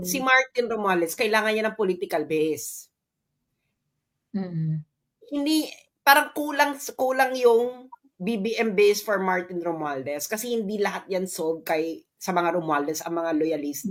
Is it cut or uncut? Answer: uncut